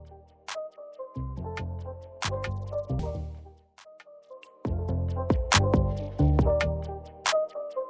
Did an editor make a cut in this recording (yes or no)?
no